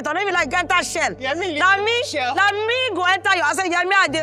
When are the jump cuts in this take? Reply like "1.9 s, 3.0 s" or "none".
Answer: none